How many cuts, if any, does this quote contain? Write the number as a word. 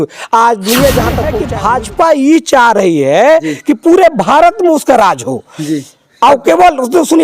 one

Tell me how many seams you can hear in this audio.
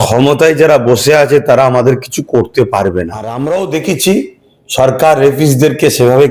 one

